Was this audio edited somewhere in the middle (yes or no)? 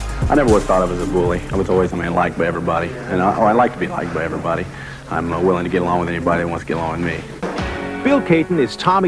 yes